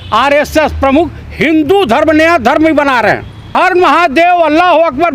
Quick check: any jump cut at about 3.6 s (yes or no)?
yes